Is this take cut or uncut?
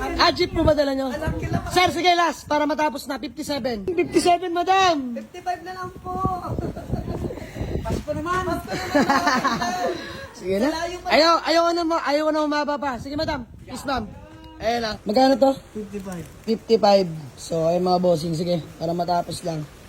cut